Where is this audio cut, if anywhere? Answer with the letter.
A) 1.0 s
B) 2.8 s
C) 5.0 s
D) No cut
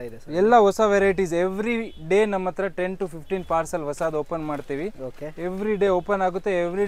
D